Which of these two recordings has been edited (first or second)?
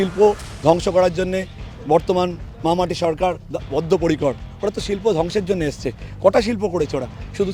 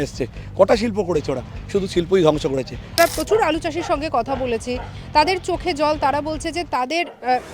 second